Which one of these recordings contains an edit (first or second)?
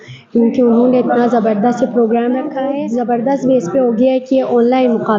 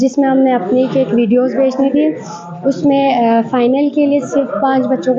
first